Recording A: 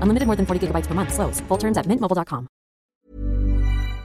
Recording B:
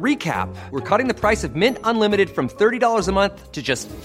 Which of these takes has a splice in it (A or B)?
A